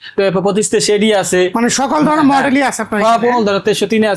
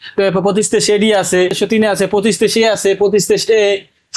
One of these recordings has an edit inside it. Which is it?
second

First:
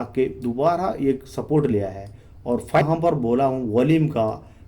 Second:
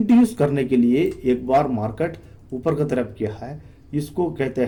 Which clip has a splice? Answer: first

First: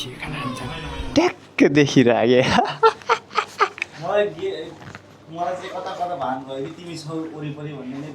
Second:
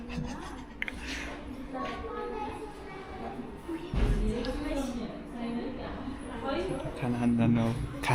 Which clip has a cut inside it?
first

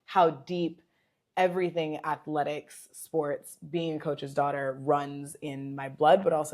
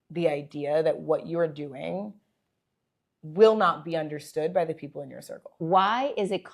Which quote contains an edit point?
second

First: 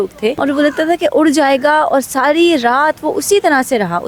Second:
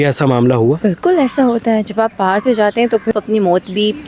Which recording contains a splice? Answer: second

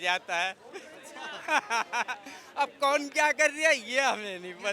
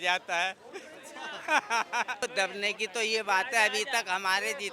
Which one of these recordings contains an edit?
second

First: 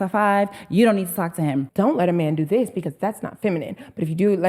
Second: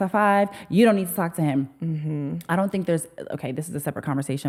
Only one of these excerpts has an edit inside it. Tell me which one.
first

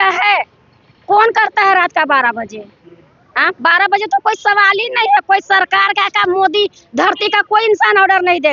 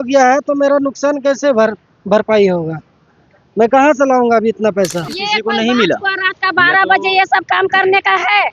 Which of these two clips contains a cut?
second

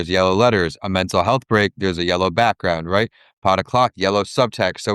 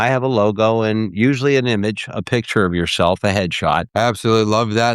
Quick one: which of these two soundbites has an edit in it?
second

